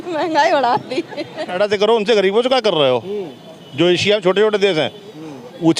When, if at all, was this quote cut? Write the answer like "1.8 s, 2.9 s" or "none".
1.5 s